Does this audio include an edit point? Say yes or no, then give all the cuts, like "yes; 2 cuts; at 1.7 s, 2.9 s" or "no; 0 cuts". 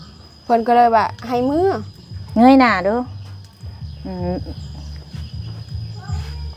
no; 0 cuts